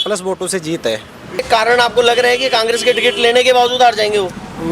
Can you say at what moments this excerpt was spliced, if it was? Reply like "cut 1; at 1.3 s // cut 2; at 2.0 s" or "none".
cut 1; at 1.4 s